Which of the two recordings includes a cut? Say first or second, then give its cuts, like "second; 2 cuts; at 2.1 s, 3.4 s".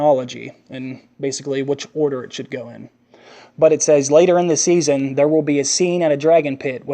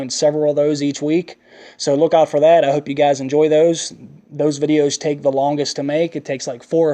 first; 1 cut; at 2.6 s